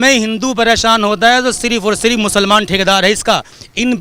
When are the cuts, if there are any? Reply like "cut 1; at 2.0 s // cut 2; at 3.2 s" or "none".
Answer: none

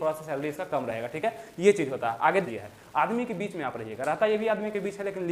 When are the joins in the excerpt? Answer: cut 1; at 2.5 s

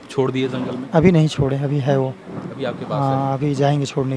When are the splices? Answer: none

